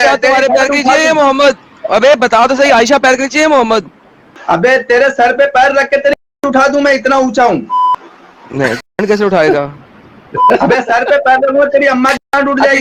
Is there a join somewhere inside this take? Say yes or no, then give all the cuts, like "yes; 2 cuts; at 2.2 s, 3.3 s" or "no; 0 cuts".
no; 0 cuts